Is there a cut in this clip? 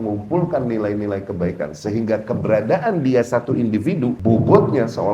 yes; 1 cut; at 4.2 s

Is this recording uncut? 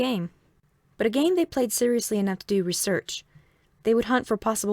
no; 1 cut; at 3.7 s

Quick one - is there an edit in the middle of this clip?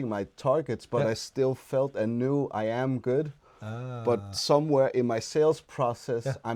no; 0 cuts

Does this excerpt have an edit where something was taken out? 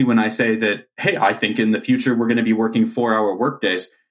no; 0 cuts

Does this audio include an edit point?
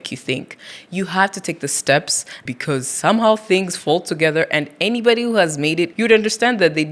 yes; 2 cuts; at 2.4 s, 5.9 s

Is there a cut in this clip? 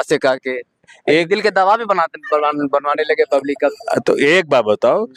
no; 0 cuts

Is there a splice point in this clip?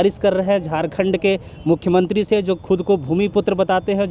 no; 0 cuts

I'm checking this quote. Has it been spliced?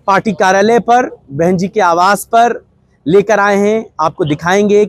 no; 0 cuts

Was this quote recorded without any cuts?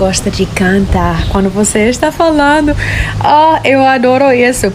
yes; 0 cuts

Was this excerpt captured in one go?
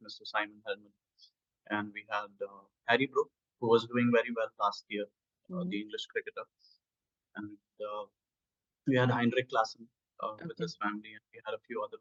yes; 0 cuts

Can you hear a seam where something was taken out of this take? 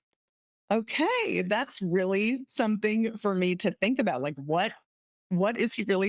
no; 0 cuts

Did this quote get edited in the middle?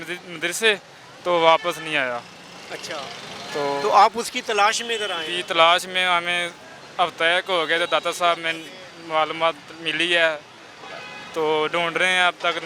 no; 0 cuts

